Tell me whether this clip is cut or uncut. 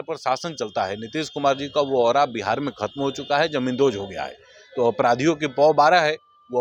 uncut